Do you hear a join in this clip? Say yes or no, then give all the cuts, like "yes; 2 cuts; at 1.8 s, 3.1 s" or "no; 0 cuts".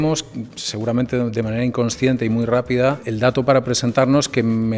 no; 0 cuts